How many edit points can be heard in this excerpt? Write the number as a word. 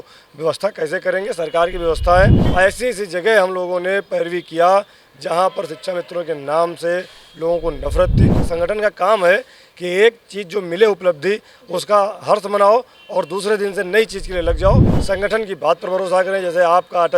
three